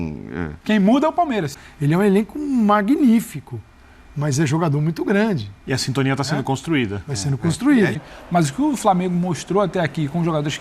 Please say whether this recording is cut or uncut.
cut